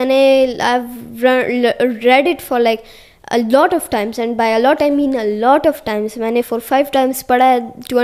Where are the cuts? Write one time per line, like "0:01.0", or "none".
none